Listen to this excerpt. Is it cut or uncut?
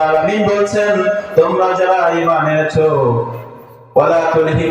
cut